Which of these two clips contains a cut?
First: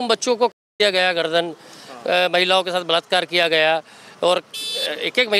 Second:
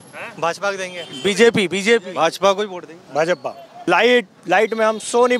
second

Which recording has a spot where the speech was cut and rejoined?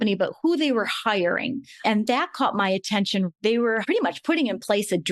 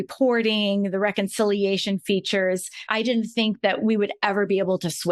second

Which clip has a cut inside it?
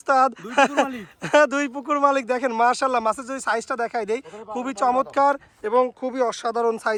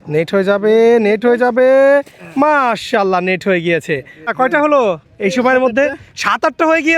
second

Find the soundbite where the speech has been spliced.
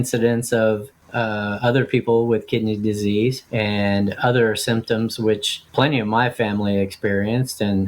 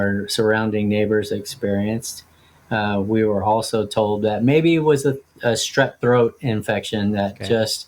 first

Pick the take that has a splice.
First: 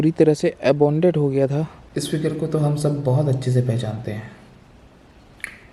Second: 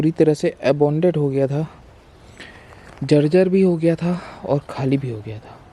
first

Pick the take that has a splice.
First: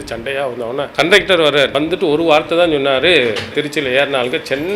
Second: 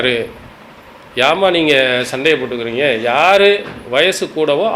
first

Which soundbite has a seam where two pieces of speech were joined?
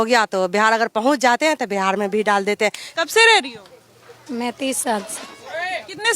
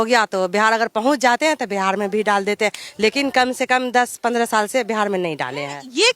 first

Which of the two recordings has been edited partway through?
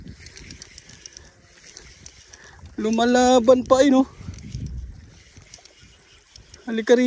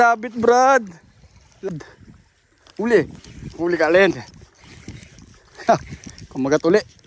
second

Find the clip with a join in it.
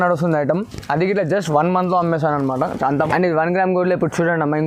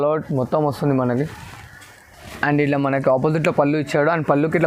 first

